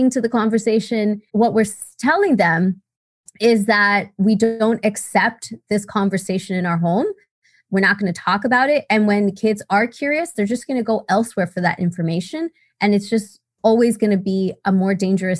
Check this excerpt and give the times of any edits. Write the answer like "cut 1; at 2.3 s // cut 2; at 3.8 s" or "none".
cut 1; at 1.2 s